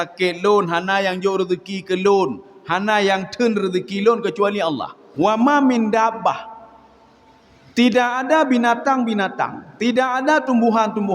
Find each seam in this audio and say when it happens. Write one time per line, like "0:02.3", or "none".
0:05.0